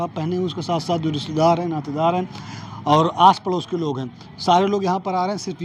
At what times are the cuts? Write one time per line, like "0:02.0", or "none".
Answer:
none